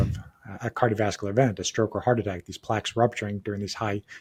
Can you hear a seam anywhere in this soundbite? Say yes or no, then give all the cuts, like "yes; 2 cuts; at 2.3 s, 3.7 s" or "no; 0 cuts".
no; 0 cuts